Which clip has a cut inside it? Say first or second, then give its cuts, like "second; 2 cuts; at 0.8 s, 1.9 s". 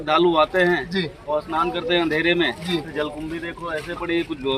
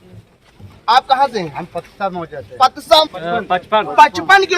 second; 1 cut; at 3.0 s